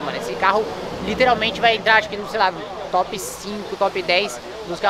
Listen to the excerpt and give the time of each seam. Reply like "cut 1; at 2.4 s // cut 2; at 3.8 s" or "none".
none